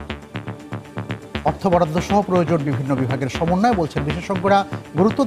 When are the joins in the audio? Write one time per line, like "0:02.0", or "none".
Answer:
none